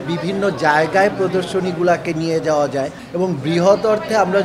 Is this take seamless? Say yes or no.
no